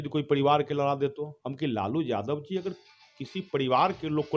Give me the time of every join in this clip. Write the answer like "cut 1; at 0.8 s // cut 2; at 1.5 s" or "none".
none

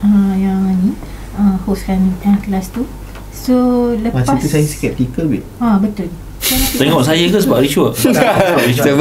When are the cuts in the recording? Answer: none

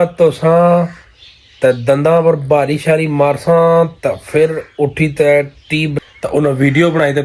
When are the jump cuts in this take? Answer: cut 1; at 5.9 s

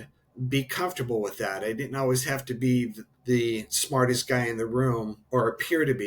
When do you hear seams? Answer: cut 1; at 3.0 s // cut 2; at 5.2 s

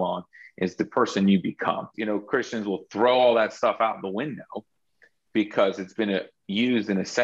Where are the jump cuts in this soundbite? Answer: cut 1; at 1.9 s

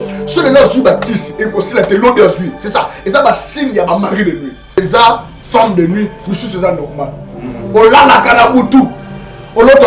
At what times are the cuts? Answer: cut 1; at 4.8 s

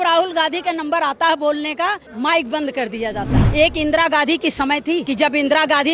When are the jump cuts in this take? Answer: cut 1; at 2.1 s // cut 2; at 3.4 s // cut 3; at 5.0 s

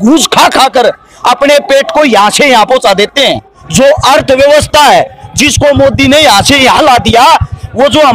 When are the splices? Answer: cut 1; at 3.6 s

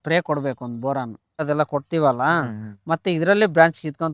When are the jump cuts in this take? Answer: cut 1; at 1.4 s

